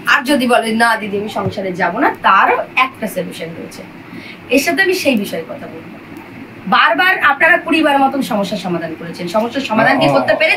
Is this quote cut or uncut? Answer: uncut